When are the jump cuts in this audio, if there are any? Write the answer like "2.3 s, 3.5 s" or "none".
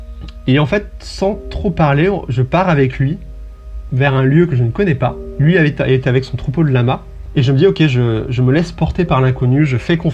5.3 s, 7.2 s